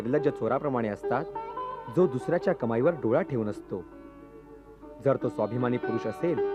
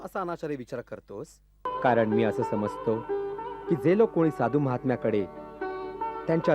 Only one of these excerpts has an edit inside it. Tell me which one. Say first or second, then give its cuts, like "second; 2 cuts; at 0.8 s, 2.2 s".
second; 1 cut; at 1.6 s